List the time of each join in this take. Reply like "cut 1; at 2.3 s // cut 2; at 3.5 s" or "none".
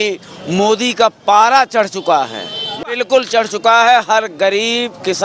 cut 1; at 2.8 s